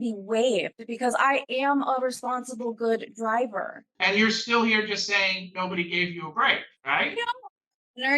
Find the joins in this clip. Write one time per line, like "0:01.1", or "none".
0:03.8
0:06.7